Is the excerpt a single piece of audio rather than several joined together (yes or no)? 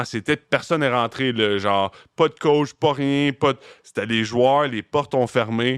yes